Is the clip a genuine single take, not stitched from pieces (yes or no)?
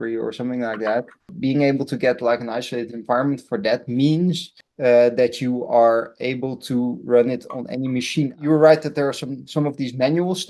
no